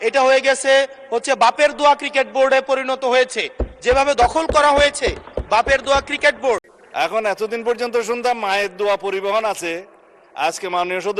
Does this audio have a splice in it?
yes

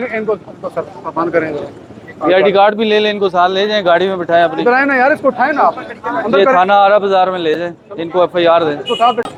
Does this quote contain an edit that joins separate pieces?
no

